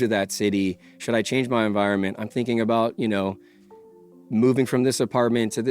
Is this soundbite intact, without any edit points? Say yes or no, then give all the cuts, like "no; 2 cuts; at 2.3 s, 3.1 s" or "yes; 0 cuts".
yes; 0 cuts